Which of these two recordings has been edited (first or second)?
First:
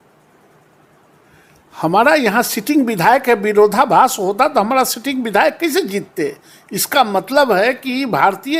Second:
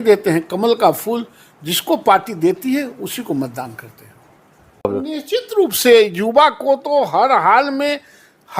second